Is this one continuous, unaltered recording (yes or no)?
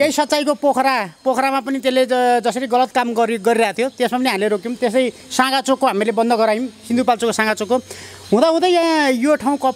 yes